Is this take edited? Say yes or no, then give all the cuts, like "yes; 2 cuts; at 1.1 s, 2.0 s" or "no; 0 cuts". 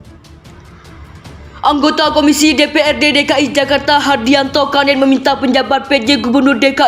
yes; 1 cut; at 1.6 s